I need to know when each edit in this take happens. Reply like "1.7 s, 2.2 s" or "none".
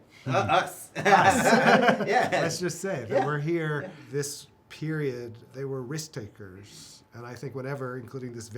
4.0 s, 5.4 s